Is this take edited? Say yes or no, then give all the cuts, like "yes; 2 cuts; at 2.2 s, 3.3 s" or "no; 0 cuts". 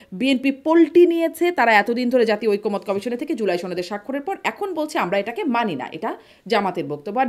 no; 0 cuts